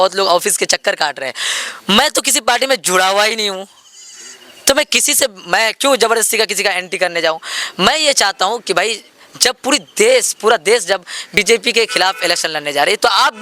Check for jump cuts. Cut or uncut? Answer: uncut